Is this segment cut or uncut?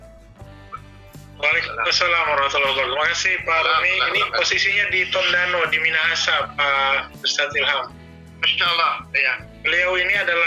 uncut